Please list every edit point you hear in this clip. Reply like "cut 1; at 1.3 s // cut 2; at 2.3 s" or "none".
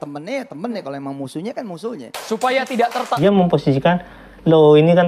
cut 1; at 3.1 s